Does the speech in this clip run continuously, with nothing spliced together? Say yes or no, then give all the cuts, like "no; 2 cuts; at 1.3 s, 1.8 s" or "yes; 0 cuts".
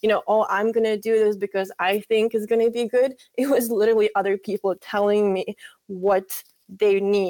yes; 0 cuts